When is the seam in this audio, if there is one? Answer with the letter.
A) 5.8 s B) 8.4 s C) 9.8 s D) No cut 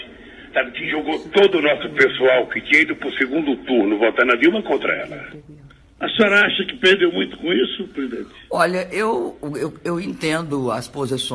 A